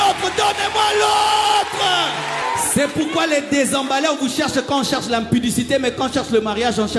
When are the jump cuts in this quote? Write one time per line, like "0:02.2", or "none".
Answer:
0:02.4